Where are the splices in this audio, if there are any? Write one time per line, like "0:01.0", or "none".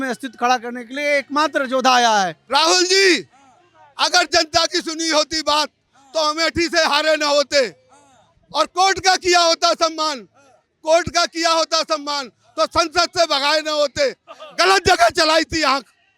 0:02.4